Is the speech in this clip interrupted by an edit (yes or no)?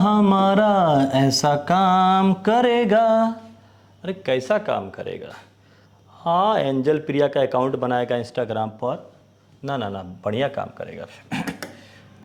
no